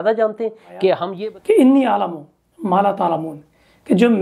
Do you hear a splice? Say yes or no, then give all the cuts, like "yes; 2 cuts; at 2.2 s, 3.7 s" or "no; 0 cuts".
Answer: yes; 1 cut; at 1.1 s